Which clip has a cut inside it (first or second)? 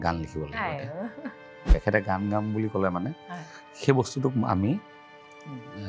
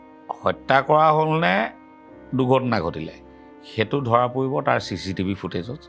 first